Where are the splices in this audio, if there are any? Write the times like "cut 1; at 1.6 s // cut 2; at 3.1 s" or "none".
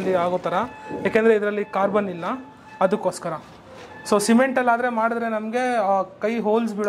none